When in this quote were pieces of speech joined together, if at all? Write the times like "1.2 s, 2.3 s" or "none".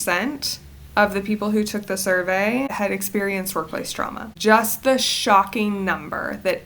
2.7 s, 4.3 s

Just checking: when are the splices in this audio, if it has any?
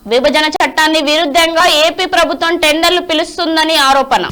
none

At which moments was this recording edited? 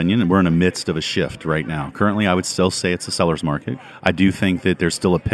3.9 s

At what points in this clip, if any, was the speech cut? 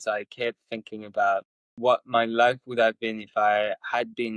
1.6 s

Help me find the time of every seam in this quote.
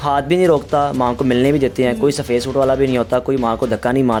none

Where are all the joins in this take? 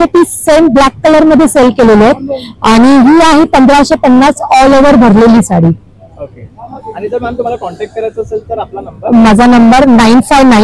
none

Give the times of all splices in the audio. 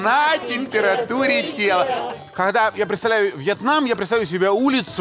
2.1 s

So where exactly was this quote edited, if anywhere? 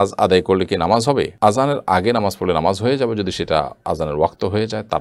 none

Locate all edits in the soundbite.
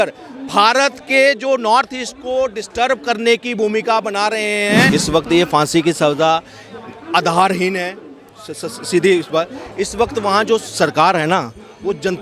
4.9 s

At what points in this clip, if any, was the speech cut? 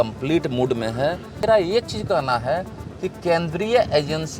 1.4 s

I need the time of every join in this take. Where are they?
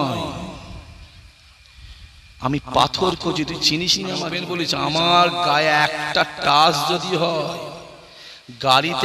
4.4 s

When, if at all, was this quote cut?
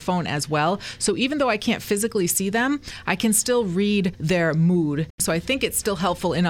4.2 s, 5.2 s

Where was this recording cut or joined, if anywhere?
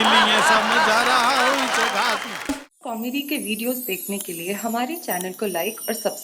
2.5 s

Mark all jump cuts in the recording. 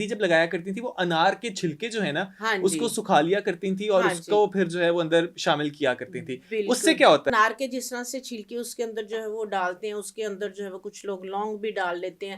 7.3 s

